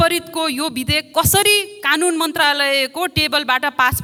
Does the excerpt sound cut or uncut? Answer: uncut